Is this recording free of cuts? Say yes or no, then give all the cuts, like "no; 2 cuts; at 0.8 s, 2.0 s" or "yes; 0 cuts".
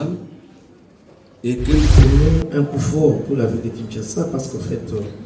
no; 1 cut; at 2.0 s